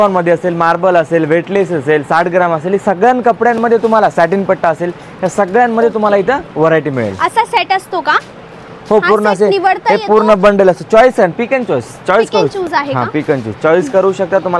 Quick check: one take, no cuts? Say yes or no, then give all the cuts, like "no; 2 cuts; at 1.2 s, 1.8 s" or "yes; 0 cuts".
yes; 0 cuts